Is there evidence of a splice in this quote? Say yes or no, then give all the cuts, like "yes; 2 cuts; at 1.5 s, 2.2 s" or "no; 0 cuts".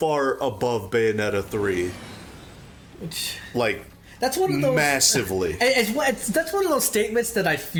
no; 0 cuts